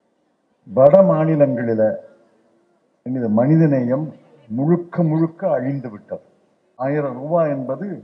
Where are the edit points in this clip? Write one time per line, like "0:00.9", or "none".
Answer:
0:06.8